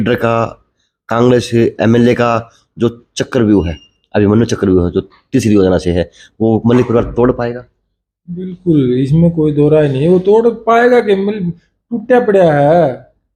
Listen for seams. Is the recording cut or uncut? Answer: uncut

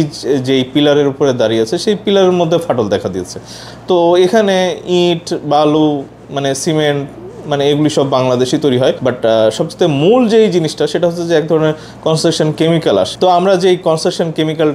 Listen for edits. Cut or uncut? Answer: uncut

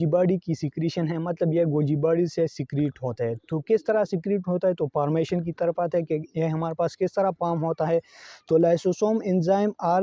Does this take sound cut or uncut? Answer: uncut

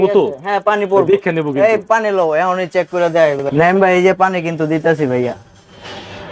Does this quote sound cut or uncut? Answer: cut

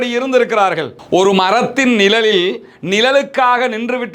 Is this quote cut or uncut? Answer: cut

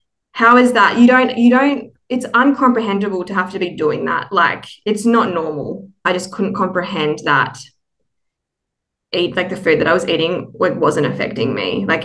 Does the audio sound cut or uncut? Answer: cut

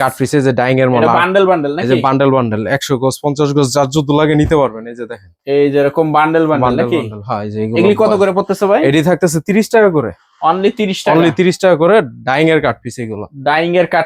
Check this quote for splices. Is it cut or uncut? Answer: uncut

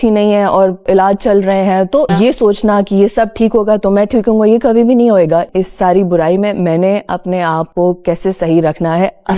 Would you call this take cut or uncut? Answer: cut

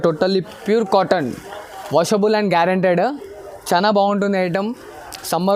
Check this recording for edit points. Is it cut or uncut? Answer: uncut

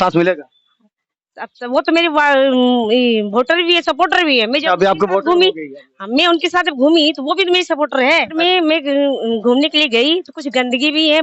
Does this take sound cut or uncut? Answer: cut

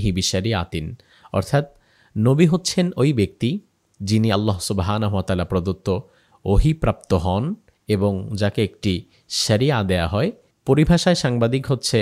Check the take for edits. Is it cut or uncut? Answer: cut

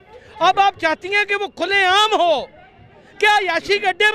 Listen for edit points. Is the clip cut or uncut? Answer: uncut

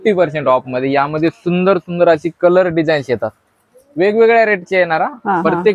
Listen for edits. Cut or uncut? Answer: uncut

